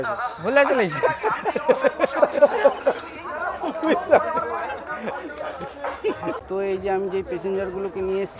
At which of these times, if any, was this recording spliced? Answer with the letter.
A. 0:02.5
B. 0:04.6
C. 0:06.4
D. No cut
D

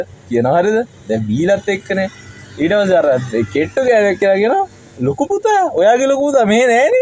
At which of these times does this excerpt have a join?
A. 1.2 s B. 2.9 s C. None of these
C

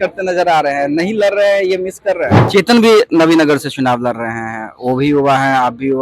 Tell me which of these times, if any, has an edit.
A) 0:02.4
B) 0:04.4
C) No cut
A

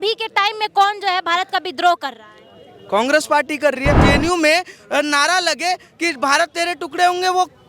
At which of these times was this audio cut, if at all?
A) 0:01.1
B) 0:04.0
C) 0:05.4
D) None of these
B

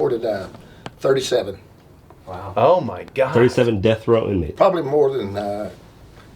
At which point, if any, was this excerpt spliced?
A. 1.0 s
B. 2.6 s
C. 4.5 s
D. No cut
C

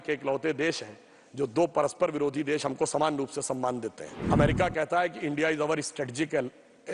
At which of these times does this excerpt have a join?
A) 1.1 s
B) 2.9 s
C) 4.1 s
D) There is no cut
C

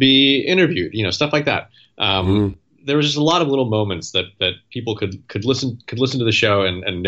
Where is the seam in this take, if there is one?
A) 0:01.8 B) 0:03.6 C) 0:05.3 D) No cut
D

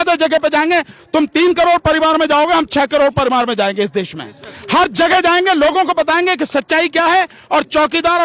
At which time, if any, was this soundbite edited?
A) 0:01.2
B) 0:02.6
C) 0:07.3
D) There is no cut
D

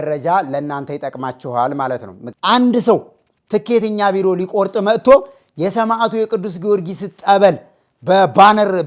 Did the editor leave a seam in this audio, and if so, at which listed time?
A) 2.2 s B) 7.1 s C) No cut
A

